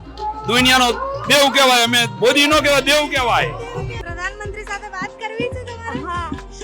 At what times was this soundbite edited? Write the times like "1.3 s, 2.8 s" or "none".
3.9 s